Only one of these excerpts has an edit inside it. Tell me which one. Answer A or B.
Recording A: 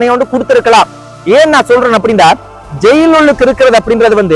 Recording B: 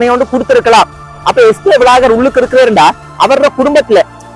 B